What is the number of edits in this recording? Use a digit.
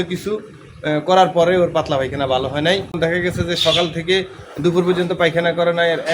1